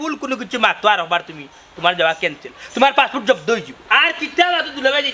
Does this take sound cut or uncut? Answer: cut